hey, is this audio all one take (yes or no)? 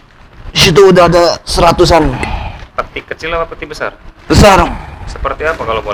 yes